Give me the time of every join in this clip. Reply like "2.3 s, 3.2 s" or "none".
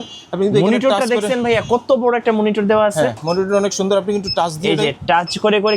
none